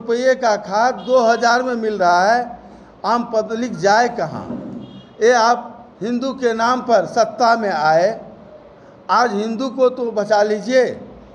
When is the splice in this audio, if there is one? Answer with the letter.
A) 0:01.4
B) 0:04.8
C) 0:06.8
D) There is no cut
D